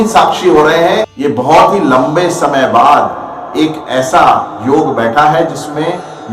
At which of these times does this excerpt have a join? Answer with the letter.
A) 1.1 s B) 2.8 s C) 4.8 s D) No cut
A